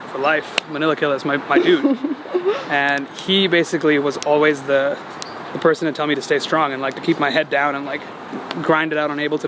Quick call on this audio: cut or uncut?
uncut